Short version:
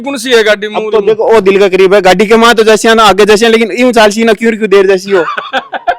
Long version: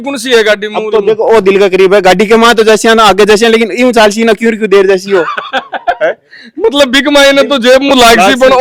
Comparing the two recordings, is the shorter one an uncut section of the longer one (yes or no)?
yes